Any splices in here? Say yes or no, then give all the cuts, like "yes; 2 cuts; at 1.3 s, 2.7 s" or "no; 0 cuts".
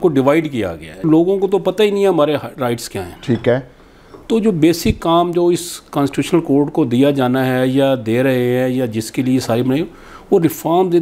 yes; 1 cut; at 1.1 s